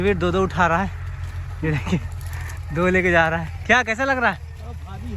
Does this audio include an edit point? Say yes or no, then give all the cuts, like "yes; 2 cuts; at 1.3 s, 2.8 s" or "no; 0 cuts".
no; 0 cuts